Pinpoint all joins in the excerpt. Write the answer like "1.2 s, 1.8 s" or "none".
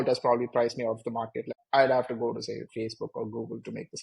1.5 s